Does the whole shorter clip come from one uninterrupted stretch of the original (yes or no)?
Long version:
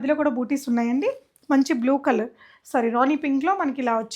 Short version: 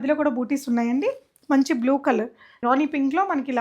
no